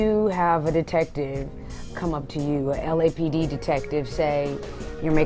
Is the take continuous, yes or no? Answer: yes